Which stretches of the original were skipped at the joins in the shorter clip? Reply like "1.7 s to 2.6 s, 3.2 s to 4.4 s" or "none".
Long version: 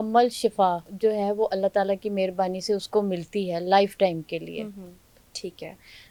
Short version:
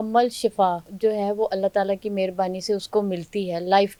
none